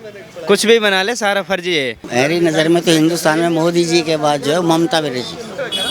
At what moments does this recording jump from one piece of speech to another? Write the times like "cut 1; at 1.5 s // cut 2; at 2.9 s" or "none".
cut 1; at 2.0 s